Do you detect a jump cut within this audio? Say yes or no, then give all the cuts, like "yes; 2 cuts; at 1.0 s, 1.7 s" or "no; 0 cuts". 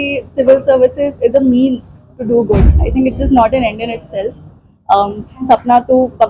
no; 0 cuts